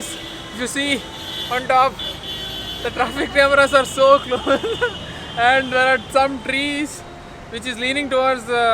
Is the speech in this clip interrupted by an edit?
no; 0 cuts

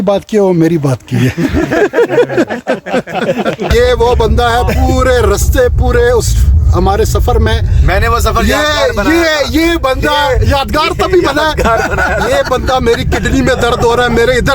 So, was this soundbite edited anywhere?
yes; 1 cut; at 3.7 s

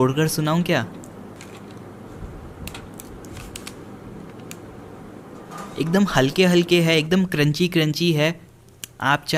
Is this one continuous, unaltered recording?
yes; 0 cuts

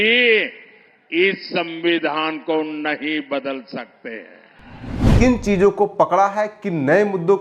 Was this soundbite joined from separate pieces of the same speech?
yes; 1 cut; at 5.1 s

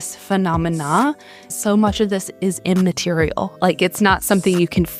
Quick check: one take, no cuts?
no; 2 cuts; at 1.5 s, 3.6 s

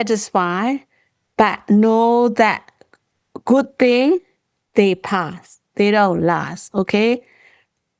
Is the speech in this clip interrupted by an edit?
no; 0 cuts

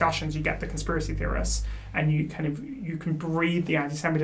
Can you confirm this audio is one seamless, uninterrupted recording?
yes; 0 cuts

